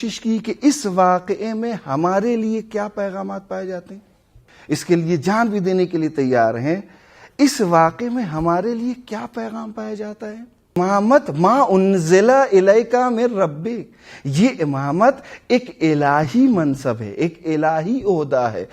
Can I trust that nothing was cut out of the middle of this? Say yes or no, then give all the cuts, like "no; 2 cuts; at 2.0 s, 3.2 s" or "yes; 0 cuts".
no; 2 cuts; at 4.5 s, 10.8 s